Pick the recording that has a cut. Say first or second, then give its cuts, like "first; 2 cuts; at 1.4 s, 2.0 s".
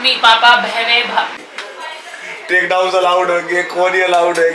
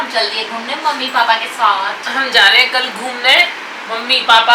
first; 1 cut; at 1.4 s